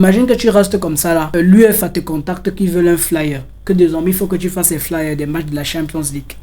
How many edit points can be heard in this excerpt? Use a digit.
1